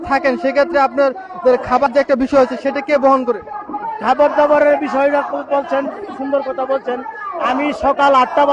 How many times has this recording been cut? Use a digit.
1